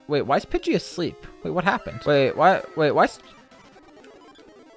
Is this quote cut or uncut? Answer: cut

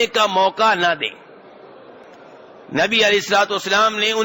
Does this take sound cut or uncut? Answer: cut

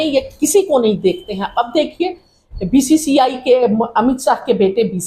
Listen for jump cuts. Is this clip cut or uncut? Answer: uncut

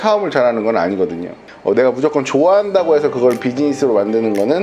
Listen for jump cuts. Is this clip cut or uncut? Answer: cut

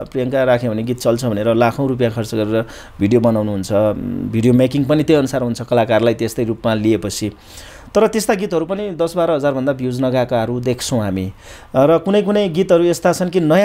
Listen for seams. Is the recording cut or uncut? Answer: uncut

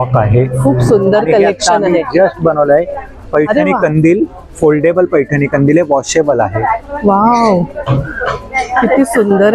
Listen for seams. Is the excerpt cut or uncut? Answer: uncut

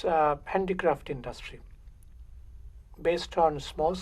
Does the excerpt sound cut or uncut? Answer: uncut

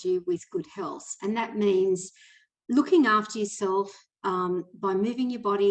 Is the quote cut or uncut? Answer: uncut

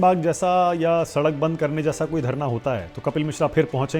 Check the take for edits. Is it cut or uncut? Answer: uncut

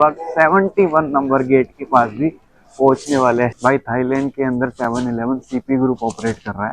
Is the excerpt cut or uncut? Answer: cut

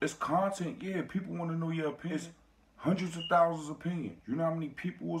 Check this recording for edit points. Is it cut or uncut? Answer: cut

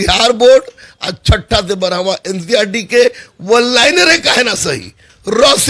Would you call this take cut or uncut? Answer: uncut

